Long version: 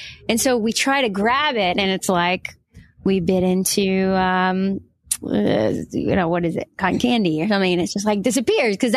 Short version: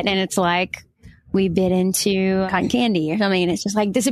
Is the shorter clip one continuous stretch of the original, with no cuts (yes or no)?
no